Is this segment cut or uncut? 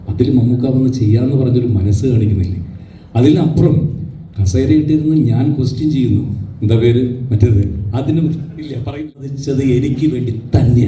cut